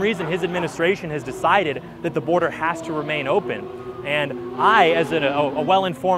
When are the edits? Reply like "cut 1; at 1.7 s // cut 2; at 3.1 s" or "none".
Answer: none